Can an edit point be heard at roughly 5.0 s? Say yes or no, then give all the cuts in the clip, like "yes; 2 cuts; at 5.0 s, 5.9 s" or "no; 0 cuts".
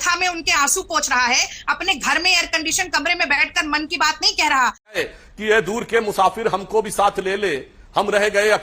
yes; 1 cut; at 5.0 s